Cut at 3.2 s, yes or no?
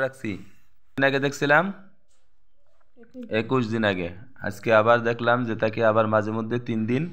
no